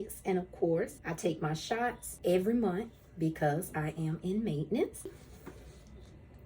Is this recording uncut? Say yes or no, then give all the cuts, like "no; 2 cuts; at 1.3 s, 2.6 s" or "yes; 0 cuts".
no; 3 cuts; at 1.0 s, 2.1 s, 5.3 s